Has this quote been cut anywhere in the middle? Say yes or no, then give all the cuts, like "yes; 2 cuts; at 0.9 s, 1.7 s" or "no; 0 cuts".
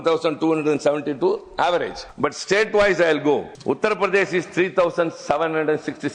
yes; 2 cuts; at 2.0 s, 3.5 s